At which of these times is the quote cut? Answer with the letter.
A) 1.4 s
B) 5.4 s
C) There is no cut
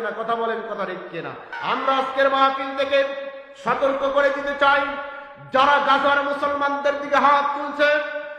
A